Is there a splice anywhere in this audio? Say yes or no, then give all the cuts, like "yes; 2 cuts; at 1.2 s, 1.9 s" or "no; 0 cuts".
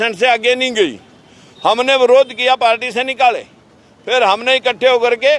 no; 0 cuts